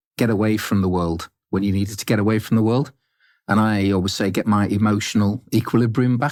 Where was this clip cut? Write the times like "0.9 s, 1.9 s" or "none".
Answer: none